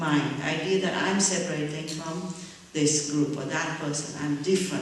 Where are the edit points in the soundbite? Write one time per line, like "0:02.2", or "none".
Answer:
0:03.1